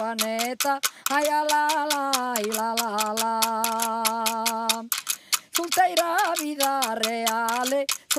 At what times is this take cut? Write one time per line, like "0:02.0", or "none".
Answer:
none